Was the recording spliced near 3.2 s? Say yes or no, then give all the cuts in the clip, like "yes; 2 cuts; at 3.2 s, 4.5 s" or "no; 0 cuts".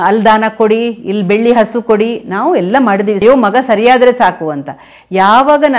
yes; 1 cut; at 3.2 s